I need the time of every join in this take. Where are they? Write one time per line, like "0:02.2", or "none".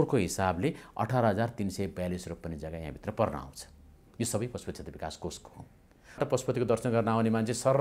0:06.2